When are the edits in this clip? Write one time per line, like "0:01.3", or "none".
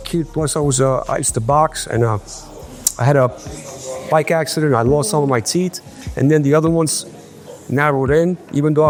none